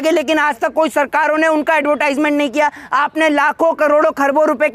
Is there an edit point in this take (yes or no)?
no